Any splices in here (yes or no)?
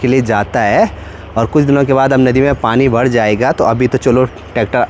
no